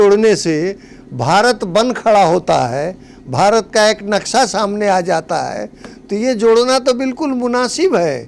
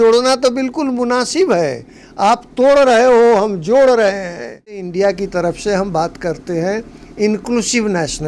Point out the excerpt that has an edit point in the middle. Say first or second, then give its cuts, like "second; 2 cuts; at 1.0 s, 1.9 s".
second; 1 cut; at 4.8 s